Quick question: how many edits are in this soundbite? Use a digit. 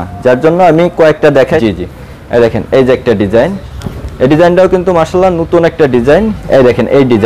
2